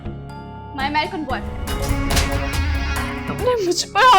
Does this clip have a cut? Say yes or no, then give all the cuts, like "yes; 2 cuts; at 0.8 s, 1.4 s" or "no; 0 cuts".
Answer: yes; 2 cuts; at 1.7 s, 3.2 s